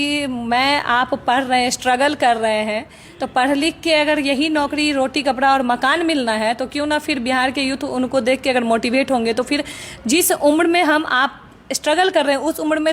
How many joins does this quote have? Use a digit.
0